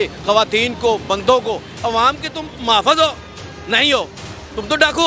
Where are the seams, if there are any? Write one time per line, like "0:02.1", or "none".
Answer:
0:01.7